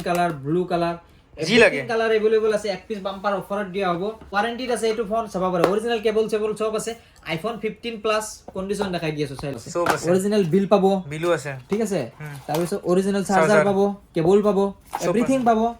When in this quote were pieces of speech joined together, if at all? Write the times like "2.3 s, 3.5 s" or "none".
4.3 s, 9.6 s